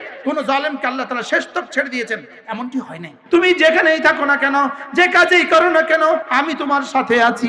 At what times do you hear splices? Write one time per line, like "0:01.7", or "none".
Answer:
0:03.2
0:06.3